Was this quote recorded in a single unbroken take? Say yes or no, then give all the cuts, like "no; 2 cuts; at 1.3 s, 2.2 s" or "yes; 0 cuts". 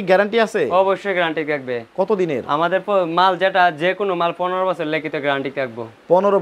yes; 0 cuts